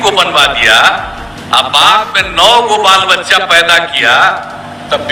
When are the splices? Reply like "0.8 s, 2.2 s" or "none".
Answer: none